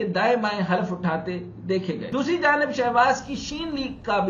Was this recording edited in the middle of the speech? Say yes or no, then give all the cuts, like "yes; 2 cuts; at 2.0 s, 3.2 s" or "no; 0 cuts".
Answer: yes; 1 cut; at 2.1 s